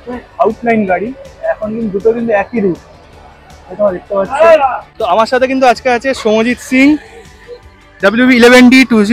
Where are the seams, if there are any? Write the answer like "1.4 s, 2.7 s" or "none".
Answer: 4.9 s